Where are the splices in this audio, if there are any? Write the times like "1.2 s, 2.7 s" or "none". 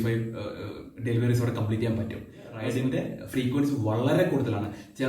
2.6 s